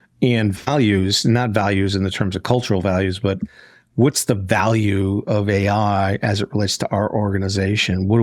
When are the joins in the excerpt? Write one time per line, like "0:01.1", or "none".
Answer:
none

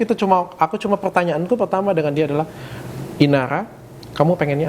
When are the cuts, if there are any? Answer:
none

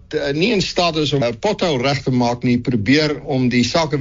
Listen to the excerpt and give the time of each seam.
0:01.2

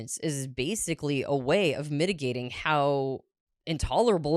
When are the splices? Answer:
none

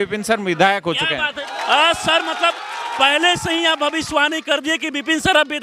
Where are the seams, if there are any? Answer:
0:01.3

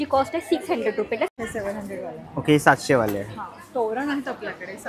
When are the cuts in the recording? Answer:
0:01.3

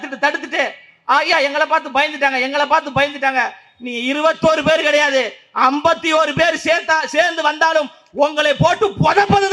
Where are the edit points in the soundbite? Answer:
none

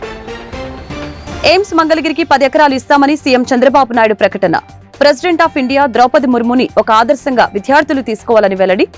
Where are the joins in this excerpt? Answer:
0:01.4

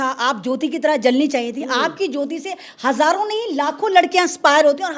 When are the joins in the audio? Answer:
none

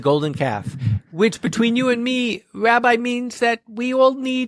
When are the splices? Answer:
none

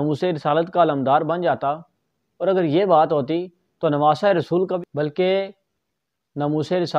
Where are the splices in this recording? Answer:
0:04.7

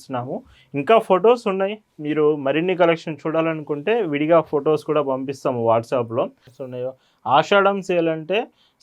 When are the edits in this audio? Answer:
0:06.5

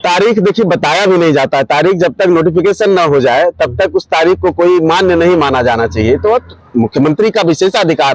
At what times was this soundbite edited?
none

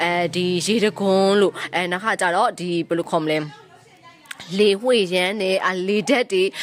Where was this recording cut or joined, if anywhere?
none

